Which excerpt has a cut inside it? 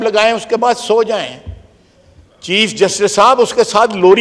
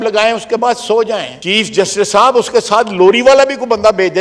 second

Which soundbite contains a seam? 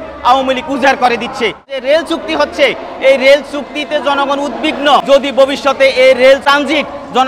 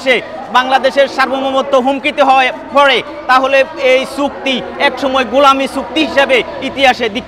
first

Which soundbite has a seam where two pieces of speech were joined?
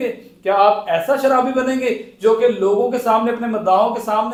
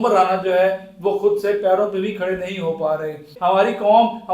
second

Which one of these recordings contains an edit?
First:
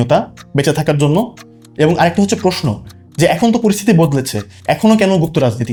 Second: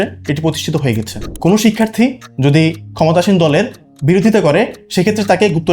second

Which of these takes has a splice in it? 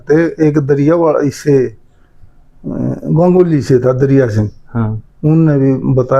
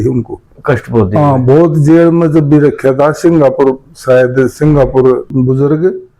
second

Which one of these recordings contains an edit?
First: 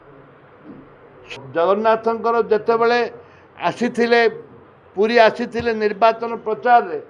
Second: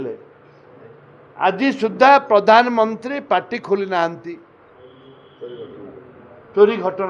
first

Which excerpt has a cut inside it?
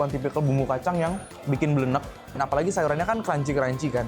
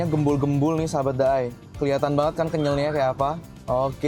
first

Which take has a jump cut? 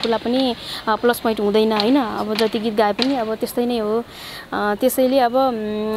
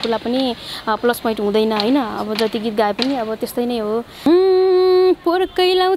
second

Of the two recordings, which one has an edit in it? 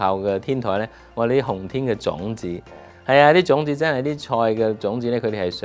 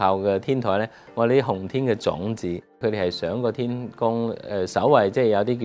second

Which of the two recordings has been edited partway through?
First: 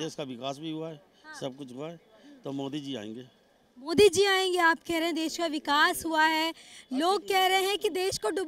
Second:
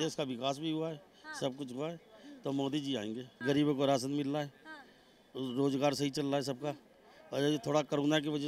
second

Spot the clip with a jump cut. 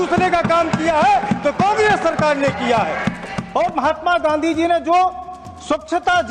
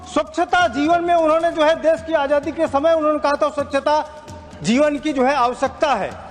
first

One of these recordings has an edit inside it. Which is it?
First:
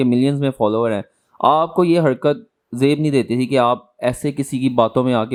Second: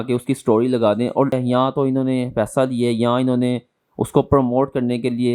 second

